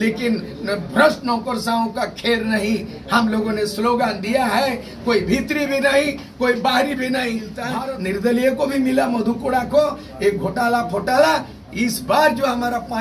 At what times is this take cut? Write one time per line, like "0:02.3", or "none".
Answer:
0:07.7